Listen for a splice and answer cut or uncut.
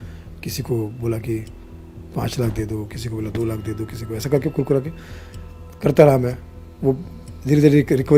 uncut